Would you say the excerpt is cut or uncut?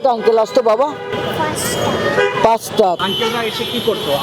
cut